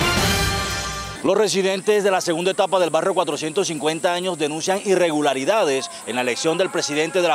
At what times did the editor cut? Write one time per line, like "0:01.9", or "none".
0:01.0